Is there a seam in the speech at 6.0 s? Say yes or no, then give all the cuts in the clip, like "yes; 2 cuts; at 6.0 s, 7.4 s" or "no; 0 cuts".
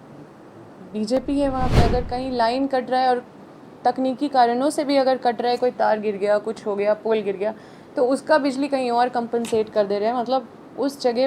no; 1 cut; at 1.8 s